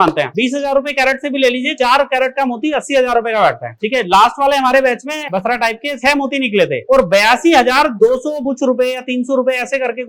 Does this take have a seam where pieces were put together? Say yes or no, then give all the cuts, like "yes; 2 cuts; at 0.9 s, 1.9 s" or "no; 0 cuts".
yes; 2 cuts; at 5.3 s, 8.4 s